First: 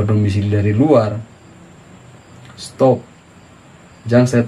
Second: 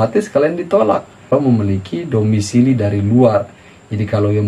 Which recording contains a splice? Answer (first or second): second